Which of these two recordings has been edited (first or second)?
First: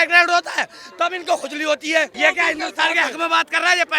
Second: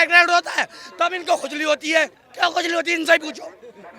first